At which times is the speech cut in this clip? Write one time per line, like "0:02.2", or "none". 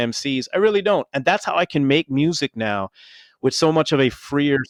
none